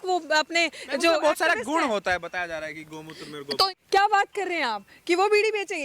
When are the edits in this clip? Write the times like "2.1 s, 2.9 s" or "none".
3.7 s

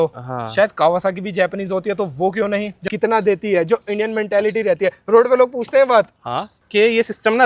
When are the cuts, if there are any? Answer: 2.8 s, 6.6 s

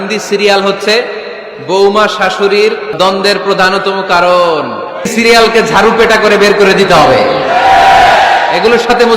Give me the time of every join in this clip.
2.9 s, 5.1 s

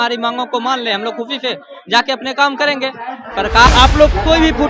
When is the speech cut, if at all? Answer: 3.7 s

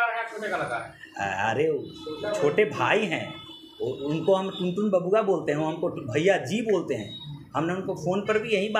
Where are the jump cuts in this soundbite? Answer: none

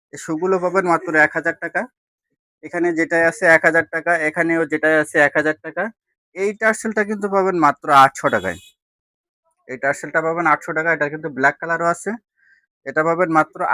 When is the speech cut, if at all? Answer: none

